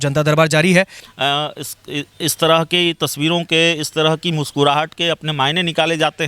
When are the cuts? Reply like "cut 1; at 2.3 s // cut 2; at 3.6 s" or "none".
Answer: cut 1; at 1.0 s